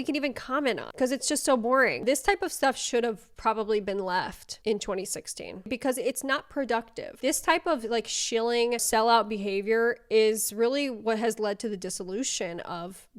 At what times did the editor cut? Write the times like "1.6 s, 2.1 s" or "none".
0.9 s, 2.0 s, 7.2 s